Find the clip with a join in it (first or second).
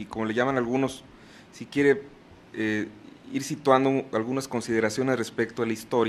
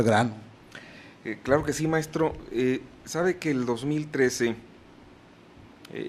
second